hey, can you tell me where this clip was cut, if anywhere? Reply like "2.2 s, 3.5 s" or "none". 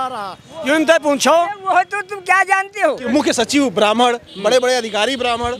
3.0 s